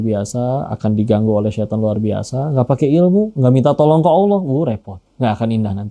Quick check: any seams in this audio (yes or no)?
no